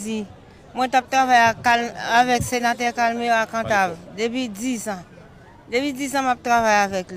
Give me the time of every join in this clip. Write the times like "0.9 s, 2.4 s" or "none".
none